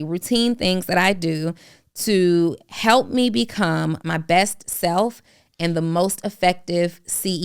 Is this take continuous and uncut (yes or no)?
no